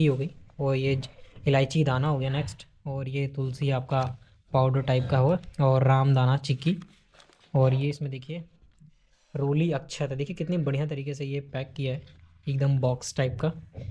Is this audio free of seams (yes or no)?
yes